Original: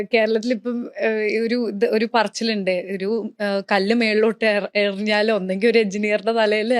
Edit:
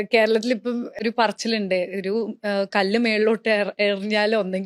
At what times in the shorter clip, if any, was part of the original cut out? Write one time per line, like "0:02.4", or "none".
0:01.0